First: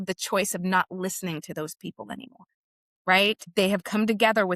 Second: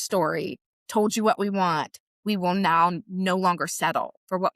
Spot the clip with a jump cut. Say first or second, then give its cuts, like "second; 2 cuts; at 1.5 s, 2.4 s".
first; 1 cut; at 3.4 s